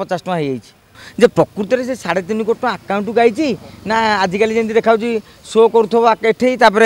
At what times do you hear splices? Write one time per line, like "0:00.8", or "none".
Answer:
0:01.0

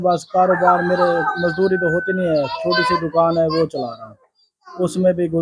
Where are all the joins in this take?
none

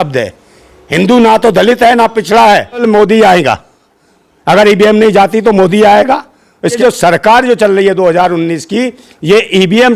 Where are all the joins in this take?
0:02.8
0:06.7

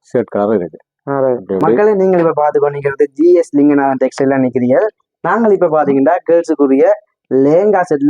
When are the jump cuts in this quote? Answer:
0:01.8

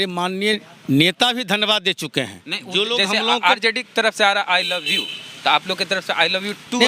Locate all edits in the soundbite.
none

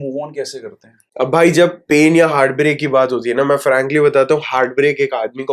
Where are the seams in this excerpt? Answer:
none

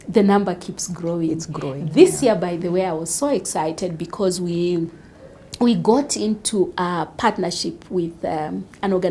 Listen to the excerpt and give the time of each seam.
none

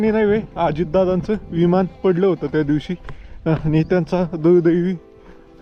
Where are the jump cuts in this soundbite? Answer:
none

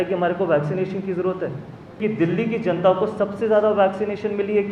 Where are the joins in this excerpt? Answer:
0:02.0

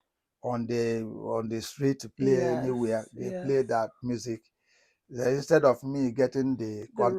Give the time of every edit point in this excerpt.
none

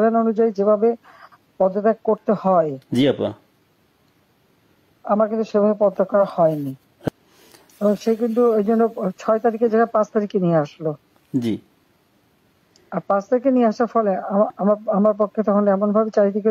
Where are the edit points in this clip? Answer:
0:07.1

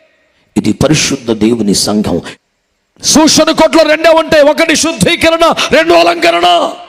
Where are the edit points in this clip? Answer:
0:02.3

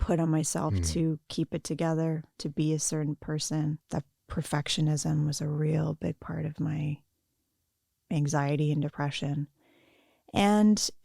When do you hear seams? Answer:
0:03.8

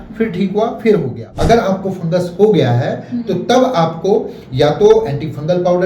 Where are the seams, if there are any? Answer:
0:01.3

